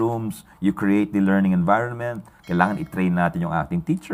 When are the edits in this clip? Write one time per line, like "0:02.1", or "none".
none